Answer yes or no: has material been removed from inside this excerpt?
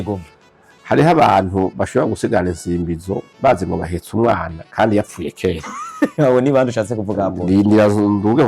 no